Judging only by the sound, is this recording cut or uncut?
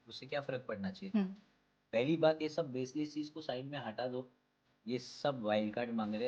uncut